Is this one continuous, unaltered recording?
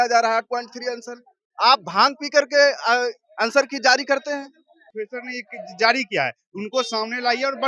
no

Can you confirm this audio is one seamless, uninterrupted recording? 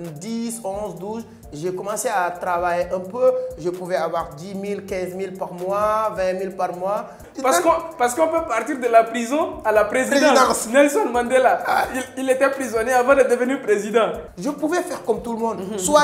no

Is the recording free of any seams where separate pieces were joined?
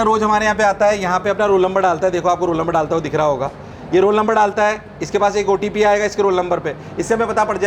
yes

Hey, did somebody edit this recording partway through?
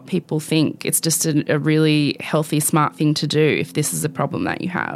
no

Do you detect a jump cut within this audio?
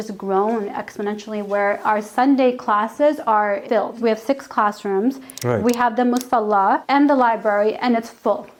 no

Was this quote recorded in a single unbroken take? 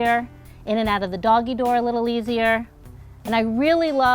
no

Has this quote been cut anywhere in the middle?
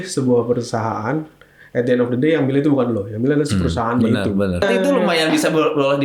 yes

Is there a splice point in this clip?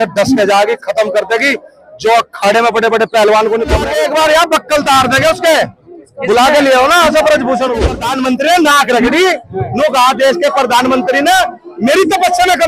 yes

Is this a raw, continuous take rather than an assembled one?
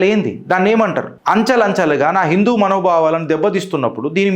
no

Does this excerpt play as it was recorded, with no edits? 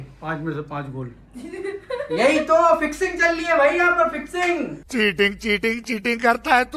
yes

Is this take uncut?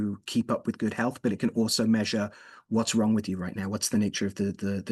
yes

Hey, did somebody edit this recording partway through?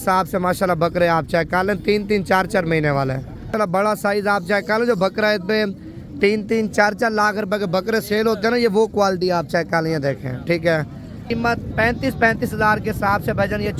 yes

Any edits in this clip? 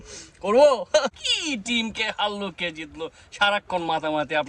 yes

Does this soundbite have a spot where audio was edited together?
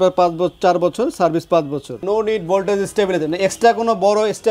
yes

